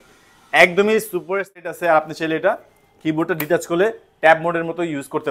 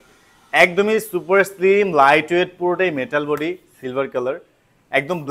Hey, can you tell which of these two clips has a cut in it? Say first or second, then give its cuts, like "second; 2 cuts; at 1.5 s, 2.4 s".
first; 1 cut; at 1.6 s